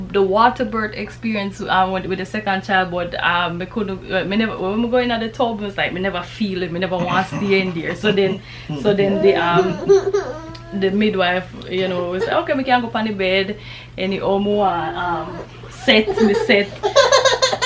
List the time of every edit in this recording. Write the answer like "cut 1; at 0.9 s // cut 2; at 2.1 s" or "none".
none